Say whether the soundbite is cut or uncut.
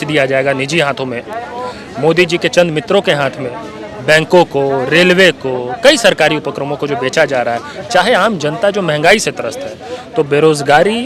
uncut